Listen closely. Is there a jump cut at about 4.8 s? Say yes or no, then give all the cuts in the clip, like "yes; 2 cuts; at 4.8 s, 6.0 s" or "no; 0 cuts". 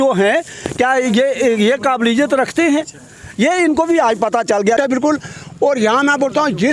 yes; 1 cut; at 4.8 s